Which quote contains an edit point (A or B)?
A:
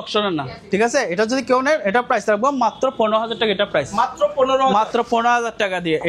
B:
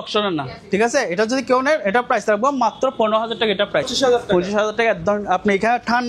B